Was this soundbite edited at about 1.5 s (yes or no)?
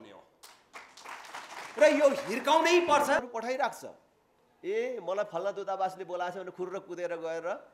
no